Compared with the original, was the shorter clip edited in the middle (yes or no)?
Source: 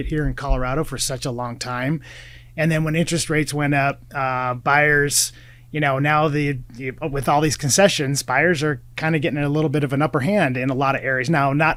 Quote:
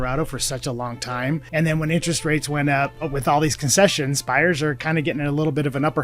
yes